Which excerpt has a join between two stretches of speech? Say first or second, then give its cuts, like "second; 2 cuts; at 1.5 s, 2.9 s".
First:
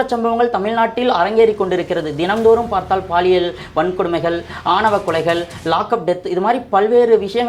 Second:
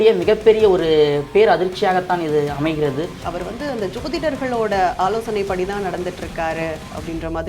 second; 1 cut; at 3.2 s